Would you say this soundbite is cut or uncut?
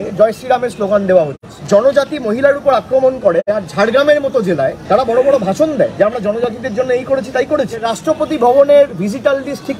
cut